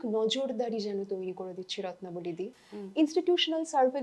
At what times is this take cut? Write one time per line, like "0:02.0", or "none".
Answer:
none